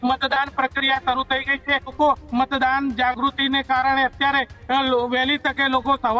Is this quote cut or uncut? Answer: cut